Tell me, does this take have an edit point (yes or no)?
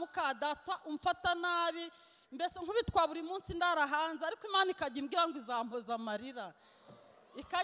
no